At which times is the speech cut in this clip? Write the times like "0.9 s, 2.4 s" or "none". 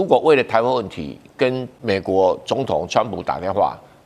1.7 s